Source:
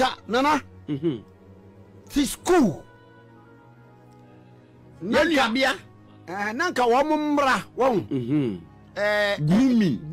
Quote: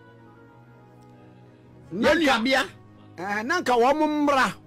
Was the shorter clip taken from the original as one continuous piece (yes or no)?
yes